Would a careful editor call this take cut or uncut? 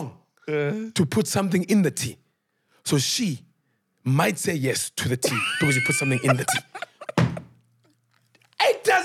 uncut